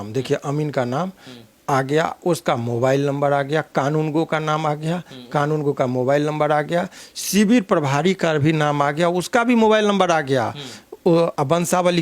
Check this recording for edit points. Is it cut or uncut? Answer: uncut